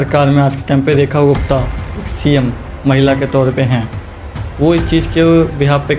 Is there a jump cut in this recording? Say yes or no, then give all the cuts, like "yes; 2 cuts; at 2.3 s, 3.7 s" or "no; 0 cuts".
no; 0 cuts